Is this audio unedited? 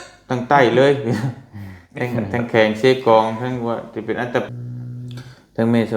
no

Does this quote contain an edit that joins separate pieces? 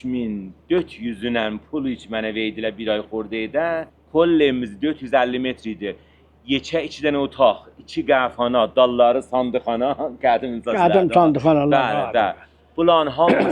yes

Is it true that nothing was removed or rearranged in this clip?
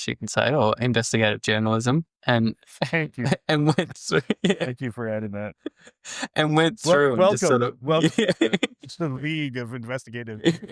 yes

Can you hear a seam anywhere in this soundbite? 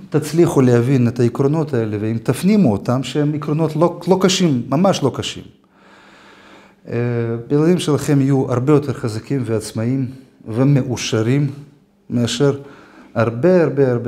no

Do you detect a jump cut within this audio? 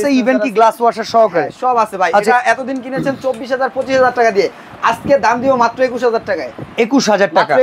no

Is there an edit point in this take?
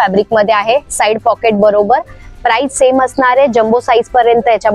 no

